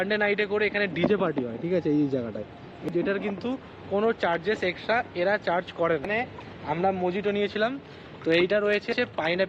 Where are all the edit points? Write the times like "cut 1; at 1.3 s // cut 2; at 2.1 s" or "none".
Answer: none